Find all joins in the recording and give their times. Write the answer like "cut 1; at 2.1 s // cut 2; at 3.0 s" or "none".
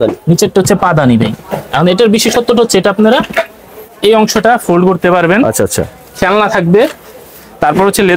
cut 1; at 3.8 s